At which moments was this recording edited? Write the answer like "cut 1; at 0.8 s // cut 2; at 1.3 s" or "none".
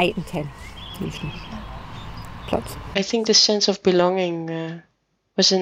cut 1; at 2.9 s